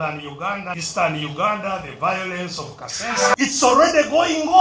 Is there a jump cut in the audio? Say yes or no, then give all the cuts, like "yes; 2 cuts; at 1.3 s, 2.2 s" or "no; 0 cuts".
yes; 2 cuts; at 0.8 s, 3.4 s